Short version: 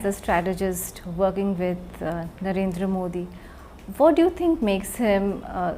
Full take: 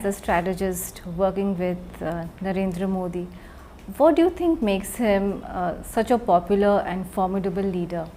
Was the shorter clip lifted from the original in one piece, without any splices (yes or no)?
yes